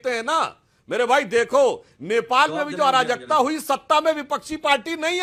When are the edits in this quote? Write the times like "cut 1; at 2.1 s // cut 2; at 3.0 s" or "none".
none